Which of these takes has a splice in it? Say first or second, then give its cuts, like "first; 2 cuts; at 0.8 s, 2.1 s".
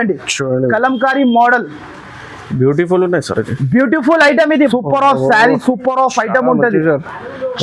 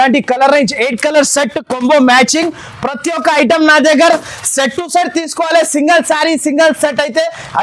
first; 1 cut; at 4.7 s